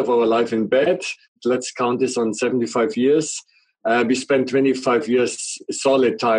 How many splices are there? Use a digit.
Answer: 1